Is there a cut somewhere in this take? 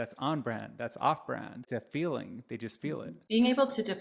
yes; 2 cuts; at 1.7 s, 3.2 s

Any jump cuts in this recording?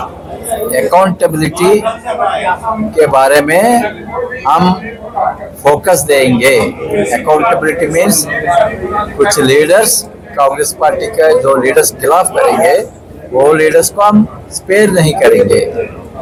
no; 0 cuts

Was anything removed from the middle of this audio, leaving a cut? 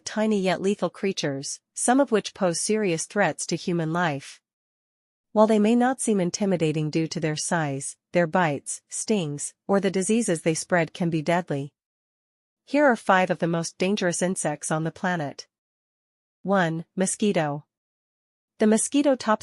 no; 0 cuts

